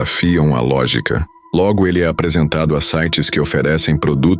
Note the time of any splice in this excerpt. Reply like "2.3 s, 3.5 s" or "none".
1.3 s